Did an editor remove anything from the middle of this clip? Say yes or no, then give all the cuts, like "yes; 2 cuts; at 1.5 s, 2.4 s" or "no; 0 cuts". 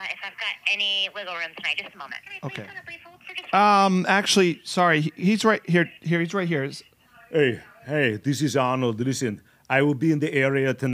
yes; 1 cut; at 2.7 s